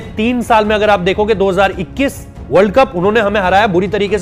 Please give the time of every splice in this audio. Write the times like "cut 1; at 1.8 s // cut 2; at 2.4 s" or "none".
none